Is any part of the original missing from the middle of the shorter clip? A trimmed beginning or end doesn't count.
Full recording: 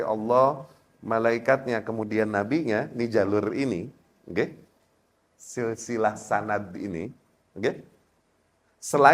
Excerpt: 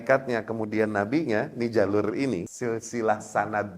yes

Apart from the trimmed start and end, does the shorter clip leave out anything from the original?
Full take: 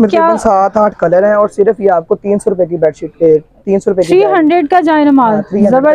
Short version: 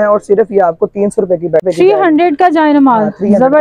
yes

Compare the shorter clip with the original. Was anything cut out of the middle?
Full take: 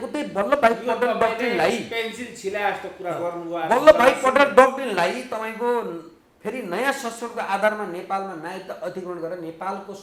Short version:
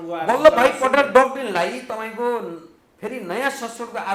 no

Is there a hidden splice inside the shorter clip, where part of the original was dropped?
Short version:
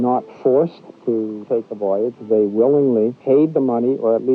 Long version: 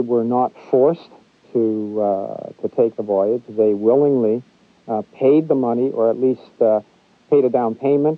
yes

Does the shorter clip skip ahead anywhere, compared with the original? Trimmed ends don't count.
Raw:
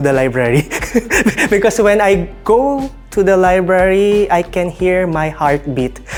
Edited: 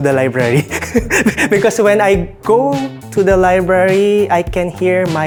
no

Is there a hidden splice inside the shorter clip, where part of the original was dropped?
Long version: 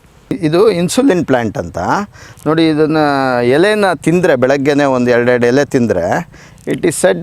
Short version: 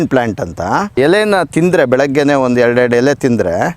yes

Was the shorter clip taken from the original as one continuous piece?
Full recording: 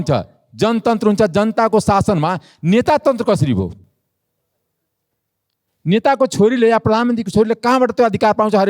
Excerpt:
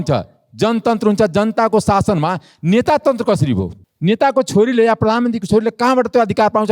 no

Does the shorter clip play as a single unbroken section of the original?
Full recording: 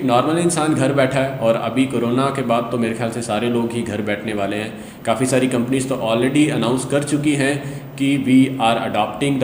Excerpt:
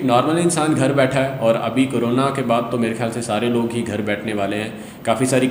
yes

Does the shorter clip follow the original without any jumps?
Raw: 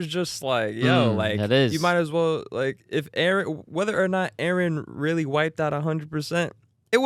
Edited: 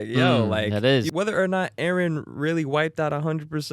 no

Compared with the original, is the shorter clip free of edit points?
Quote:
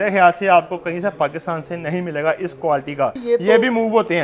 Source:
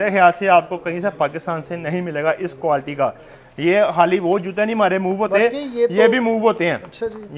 no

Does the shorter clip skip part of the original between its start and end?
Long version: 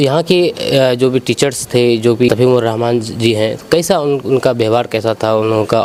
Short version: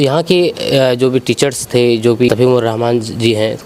no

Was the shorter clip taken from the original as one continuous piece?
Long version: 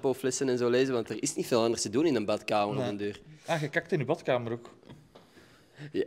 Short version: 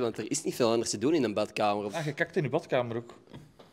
no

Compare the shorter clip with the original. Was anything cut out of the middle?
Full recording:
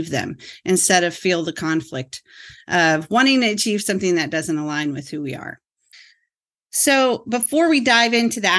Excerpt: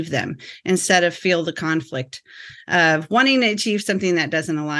no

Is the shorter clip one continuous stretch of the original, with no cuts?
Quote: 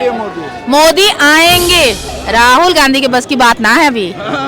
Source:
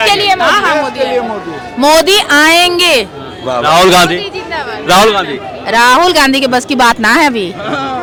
no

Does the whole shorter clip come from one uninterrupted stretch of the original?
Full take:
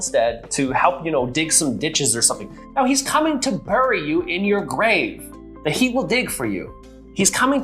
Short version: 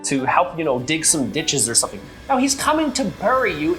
yes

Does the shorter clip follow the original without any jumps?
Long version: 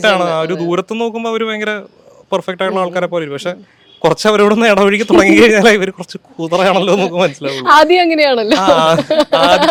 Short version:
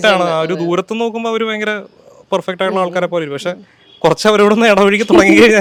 yes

